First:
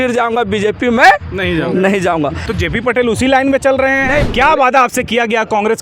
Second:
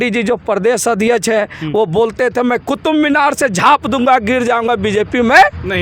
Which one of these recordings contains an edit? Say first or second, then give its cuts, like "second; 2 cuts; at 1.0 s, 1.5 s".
first; 2 cuts; at 2.5 s, 4.2 s